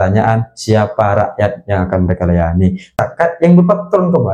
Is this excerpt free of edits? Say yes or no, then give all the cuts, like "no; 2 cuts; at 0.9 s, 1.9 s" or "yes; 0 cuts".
no; 1 cut; at 3.0 s